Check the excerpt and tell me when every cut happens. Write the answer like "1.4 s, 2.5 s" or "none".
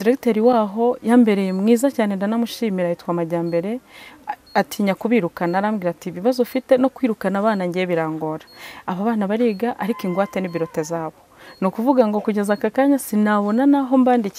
none

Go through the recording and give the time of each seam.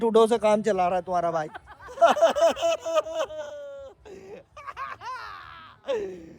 none

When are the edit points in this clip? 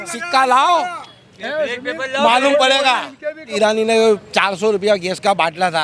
3.5 s

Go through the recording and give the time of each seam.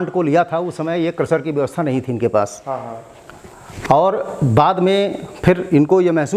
none

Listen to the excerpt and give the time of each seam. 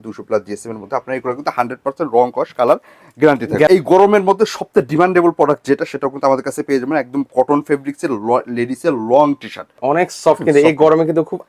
3.7 s, 9.8 s

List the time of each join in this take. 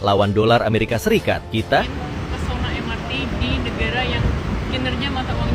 1.9 s

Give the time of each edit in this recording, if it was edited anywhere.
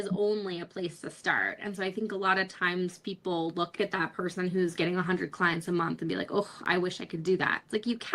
3.8 s

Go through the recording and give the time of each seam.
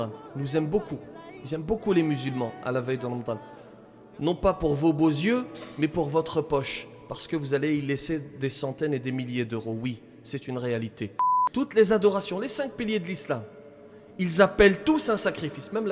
11.3 s

